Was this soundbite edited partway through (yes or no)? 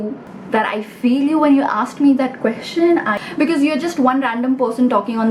yes